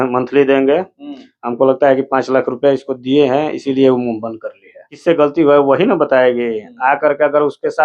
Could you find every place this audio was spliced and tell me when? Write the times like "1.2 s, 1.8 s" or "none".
4.9 s